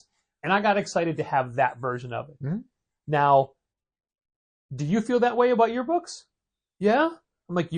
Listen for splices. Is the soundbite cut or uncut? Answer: uncut